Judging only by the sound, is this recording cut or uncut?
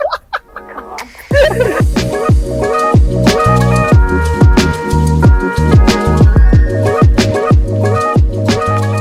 cut